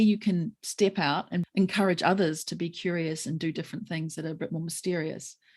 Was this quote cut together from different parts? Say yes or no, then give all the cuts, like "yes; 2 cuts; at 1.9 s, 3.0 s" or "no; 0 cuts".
yes; 1 cut; at 1.4 s